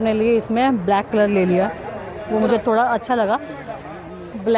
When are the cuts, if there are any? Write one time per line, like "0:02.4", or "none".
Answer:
none